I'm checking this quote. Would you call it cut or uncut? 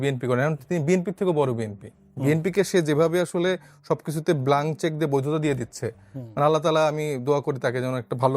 uncut